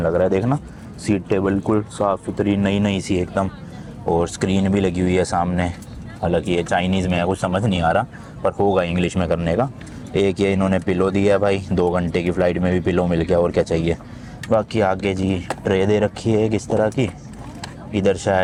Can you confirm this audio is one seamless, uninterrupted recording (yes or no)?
yes